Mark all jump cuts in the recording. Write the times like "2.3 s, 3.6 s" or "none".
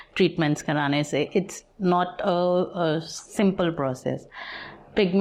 none